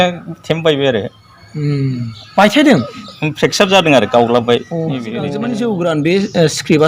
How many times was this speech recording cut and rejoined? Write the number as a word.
one